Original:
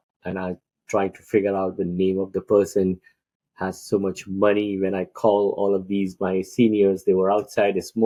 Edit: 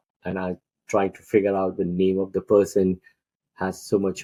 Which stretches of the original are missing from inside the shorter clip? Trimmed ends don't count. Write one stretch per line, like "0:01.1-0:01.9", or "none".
none